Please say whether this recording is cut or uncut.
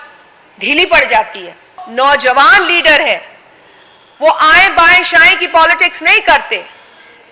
cut